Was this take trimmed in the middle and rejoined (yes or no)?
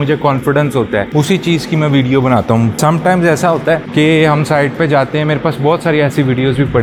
no